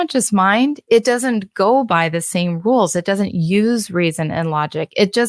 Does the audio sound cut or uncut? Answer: uncut